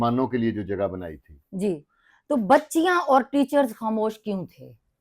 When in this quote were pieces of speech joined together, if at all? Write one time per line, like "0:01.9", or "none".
none